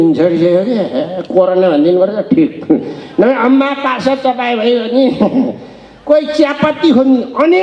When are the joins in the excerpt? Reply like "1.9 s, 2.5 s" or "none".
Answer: none